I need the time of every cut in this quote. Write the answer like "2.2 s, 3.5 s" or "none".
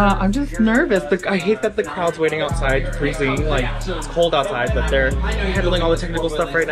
none